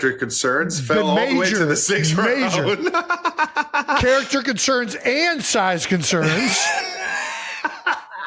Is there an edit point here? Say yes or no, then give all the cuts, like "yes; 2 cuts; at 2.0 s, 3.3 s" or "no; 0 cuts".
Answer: no; 0 cuts